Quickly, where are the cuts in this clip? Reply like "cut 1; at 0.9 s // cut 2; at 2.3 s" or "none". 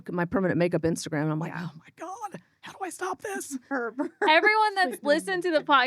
cut 1; at 3.6 s